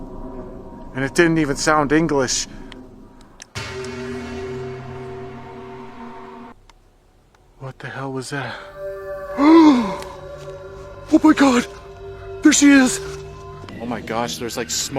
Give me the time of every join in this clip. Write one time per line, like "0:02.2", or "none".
0:06.6
0:13.8